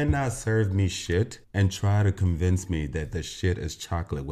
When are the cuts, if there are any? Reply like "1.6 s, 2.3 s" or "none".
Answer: none